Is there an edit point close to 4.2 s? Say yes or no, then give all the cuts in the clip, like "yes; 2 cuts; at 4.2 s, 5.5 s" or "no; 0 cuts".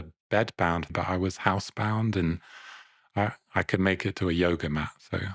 no; 1 cut; at 0.9 s